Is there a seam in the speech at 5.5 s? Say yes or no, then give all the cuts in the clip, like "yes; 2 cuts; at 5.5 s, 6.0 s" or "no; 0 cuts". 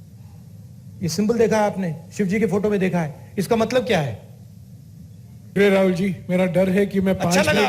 yes; 1 cut; at 5.5 s